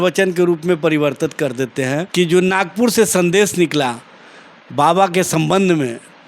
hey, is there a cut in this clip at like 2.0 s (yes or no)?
yes